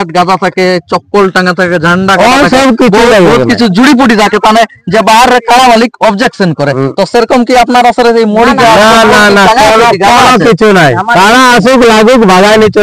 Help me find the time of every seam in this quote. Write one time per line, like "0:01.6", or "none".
none